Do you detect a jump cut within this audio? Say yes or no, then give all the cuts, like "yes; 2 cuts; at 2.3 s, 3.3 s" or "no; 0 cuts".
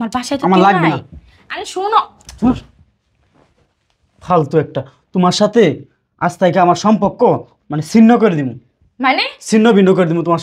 no; 0 cuts